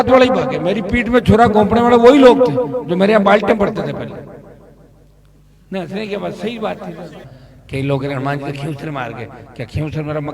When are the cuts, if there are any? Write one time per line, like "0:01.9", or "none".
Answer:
0:07.2